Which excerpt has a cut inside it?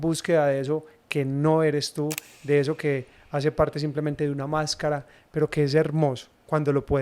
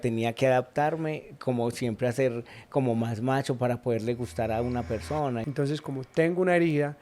second; 1 cut; at 5.4 s

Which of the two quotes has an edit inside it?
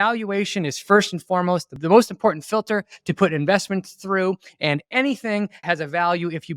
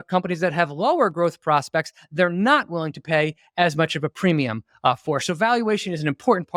first; 2 cuts; at 1.7 s, 5.6 s

